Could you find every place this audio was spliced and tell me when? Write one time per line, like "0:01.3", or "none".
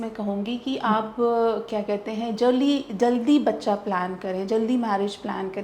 none